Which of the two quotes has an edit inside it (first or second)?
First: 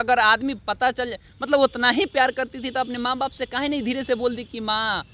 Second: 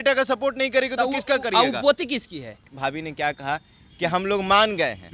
second